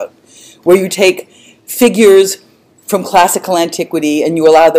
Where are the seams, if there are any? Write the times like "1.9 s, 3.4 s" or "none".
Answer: 1.7 s